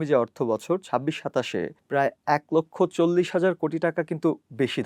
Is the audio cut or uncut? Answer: cut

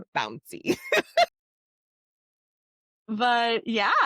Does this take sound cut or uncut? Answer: uncut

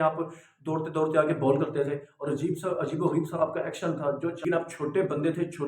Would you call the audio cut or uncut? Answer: cut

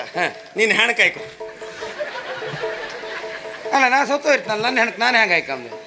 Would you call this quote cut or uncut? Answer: uncut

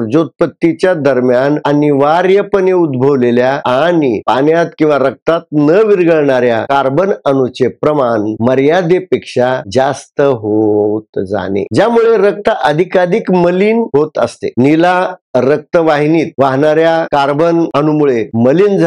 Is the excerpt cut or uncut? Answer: uncut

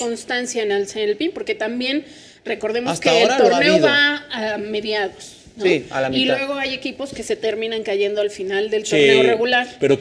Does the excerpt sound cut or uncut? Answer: uncut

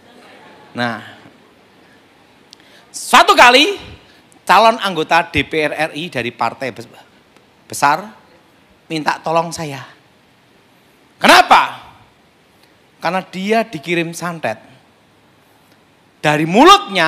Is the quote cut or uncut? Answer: uncut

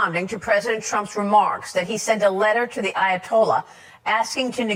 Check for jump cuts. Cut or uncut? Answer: uncut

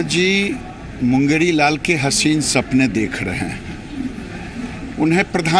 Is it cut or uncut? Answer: uncut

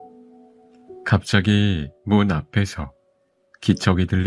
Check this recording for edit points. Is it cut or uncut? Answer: uncut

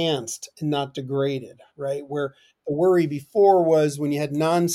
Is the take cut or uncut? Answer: uncut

